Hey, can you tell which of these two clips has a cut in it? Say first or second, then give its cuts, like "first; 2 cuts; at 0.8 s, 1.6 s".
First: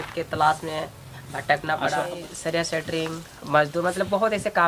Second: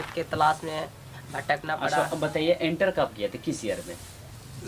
first; 1 cut; at 2.1 s